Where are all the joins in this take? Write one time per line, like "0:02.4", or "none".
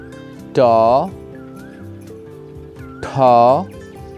0:01.1
0:02.5